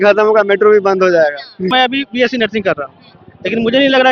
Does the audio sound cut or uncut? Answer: cut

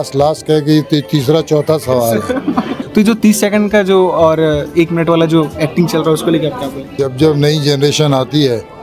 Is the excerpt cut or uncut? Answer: cut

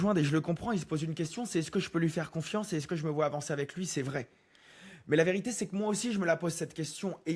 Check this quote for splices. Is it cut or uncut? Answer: uncut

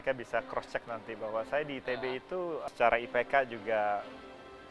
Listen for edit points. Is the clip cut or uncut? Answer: cut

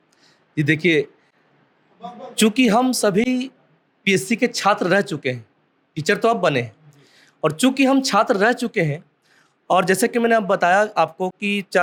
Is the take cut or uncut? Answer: uncut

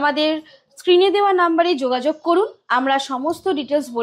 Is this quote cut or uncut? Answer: uncut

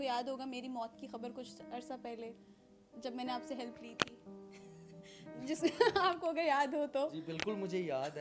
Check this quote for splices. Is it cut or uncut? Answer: uncut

